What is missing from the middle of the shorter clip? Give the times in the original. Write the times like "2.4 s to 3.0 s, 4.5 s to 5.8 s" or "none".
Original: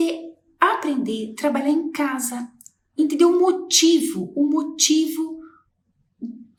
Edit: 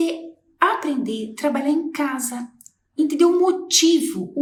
none